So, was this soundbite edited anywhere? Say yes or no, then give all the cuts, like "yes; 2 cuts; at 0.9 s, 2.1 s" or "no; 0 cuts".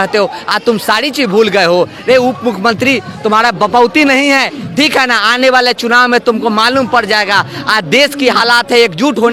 no; 0 cuts